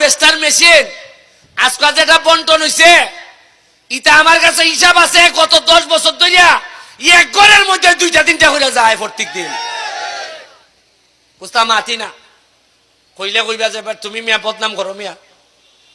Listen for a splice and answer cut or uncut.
uncut